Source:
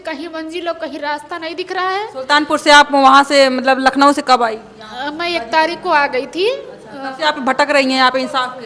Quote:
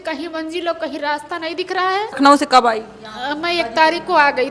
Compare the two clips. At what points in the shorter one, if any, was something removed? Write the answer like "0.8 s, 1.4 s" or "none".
2.2 s